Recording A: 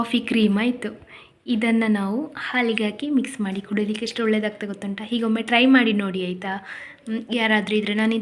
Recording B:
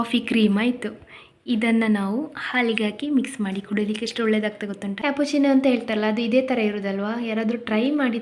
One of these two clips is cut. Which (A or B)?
B